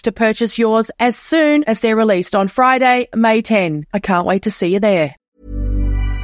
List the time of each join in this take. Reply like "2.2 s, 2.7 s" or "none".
5.3 s